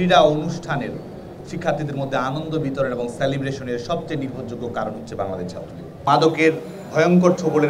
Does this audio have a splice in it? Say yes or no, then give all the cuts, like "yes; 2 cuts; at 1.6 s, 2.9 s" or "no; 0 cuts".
yes; 1 cut; at 6.0 s